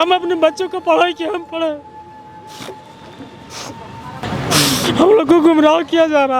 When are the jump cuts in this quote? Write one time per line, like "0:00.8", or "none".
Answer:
0:04.2